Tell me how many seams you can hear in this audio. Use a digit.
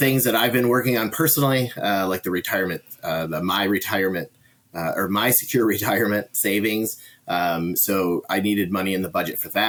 0